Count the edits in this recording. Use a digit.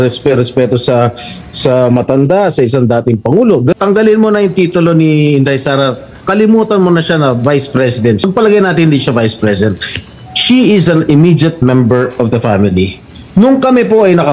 2